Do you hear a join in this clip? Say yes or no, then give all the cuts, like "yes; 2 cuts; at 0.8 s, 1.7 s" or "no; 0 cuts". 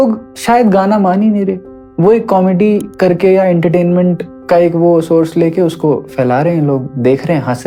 no; 0 cuts